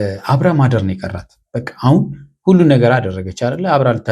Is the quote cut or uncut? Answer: uncut